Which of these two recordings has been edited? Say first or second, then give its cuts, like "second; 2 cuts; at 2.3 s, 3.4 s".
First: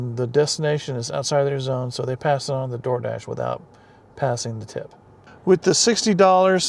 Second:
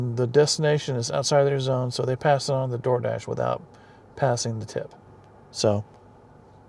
first; 1 cut; at 5.2 s